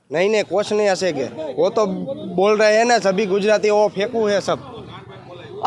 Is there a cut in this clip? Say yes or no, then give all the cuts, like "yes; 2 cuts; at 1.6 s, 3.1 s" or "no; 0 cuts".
no; 0 cuts